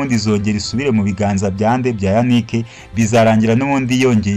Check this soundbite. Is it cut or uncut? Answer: uncut